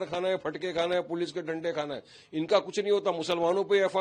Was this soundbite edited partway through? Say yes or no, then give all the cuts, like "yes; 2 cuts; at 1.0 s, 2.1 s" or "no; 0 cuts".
no; 0 cuts